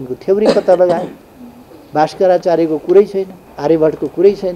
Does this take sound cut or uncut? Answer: cut